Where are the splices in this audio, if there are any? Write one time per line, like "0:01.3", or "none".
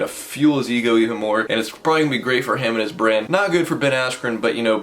0:01.5
0:03.3